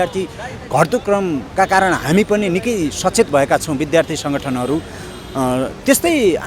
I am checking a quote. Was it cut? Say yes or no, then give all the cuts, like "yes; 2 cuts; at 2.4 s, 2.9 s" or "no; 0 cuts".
no; 0 cuts